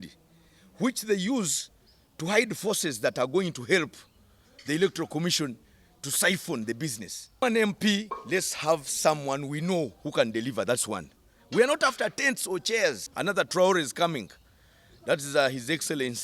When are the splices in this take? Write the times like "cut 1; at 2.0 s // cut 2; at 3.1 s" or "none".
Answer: cut 1; at 7.4 s // cut 2; at 13.1 s